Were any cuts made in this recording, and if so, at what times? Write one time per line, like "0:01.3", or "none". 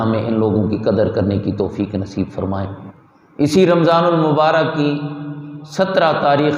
0:02.8